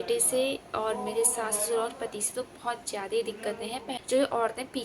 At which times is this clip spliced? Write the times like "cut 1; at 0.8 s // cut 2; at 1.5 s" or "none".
cut 1; at 3.9 s

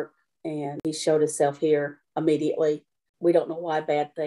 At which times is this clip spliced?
none

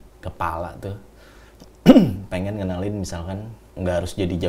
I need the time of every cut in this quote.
cut 1; at 3.6 s

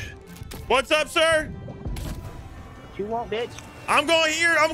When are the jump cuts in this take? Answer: none

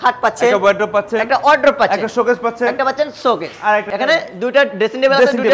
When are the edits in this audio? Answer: none

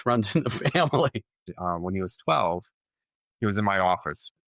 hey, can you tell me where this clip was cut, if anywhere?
cut 1; at 1.3 s

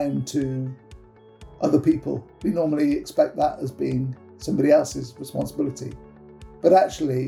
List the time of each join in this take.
none

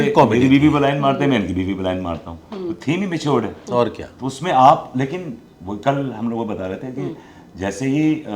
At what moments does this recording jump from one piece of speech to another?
none

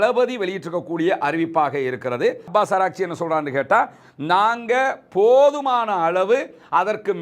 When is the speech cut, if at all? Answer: cut 1; at 2.5 s

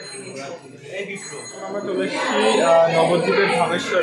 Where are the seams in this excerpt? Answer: cut 1; at 1.9 s

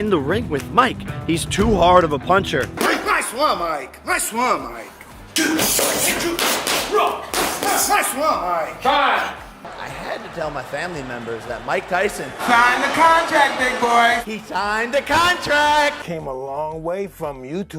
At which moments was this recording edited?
cut 1; at 2.7 s // cut 2; at 9.6 s // cut 3; at 16.0 s

